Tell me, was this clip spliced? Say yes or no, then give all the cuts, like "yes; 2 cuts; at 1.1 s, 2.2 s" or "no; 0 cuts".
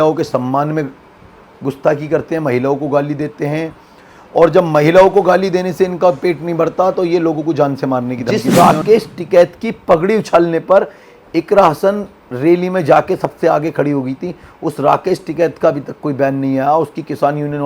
yes; 1 cut; at 8.3 s